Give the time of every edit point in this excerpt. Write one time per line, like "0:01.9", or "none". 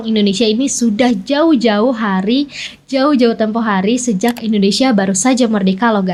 none